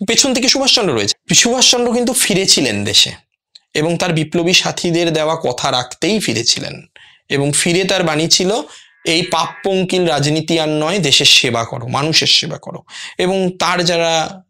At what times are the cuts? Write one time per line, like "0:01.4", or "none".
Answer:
0:01.1